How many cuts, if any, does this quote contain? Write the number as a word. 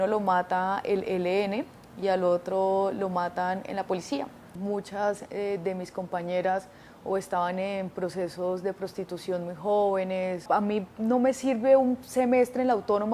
two